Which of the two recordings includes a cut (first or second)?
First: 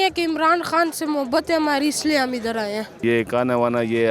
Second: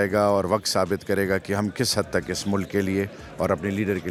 first